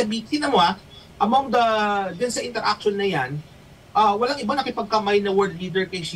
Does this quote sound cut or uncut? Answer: uncut